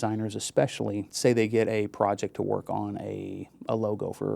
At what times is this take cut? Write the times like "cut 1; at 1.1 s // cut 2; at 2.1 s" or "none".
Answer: cut 1; at 1.1 s